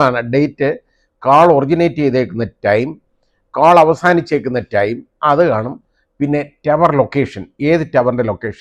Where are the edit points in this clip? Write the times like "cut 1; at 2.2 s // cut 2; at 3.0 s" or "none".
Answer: cut 1; at 5.1 s